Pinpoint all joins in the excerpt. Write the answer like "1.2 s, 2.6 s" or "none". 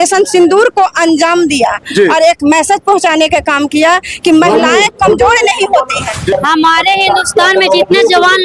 6.3 s